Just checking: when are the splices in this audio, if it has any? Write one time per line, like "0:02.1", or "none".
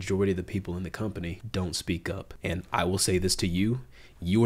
0:01.4
0:02.3